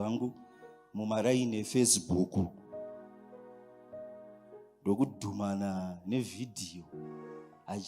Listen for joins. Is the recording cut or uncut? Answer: cut